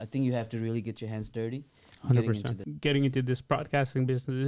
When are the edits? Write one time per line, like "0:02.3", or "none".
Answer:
0:02.6